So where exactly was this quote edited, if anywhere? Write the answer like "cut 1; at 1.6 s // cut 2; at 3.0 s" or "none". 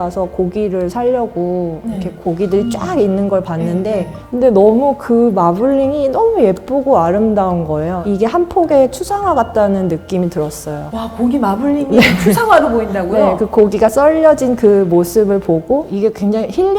cut 1; at 4.2 s // cut 2; at 8.0 s // cut 3; at 15.9 s